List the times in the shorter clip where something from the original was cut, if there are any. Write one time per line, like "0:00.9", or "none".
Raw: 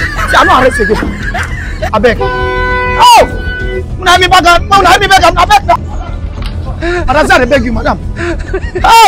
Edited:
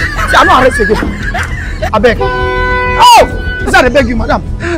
0:03.7